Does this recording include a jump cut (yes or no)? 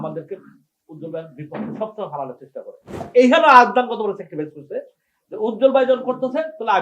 yes